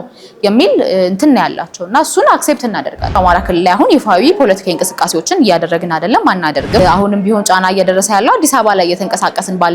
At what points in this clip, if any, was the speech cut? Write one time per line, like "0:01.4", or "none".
0:03.2
0:06.8